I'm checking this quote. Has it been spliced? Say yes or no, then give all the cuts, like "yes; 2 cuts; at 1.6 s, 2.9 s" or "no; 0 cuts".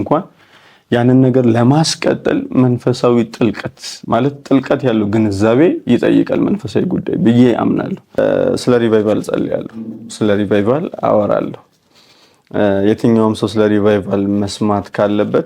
yes; 1 cut; at 8.2 s